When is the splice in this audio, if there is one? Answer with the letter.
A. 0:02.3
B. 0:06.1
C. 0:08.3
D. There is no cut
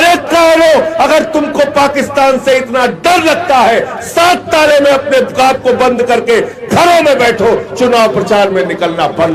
D